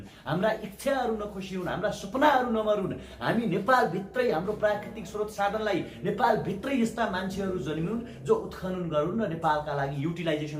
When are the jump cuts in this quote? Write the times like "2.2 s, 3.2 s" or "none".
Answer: none